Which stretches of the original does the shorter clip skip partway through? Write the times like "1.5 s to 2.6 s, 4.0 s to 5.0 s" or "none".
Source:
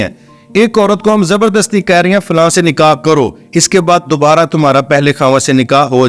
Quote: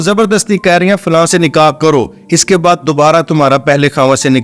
none